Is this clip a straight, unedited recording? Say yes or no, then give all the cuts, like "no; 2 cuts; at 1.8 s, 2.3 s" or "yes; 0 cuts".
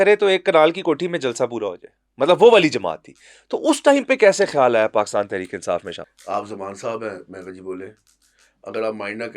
no; 1 cut; at 6.1 s